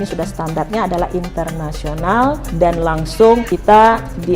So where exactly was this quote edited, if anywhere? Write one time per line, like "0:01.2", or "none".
0:02.5
0:03.5